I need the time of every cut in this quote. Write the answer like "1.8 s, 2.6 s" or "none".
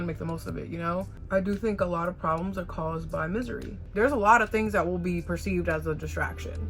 1.2 s, 3.8 s